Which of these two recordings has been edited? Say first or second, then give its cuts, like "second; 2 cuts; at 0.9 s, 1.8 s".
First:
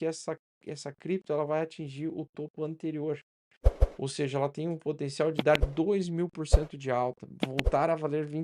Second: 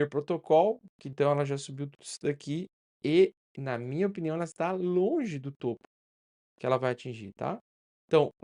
second; 1 cut; at 1.1 s